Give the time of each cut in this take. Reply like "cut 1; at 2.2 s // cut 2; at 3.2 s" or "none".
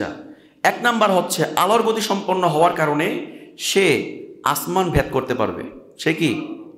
none